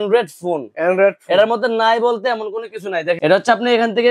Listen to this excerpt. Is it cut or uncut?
uncut